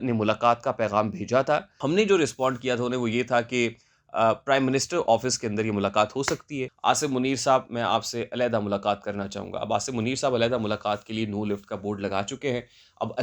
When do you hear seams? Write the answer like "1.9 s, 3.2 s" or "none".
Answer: 1.7 s, 6.6 s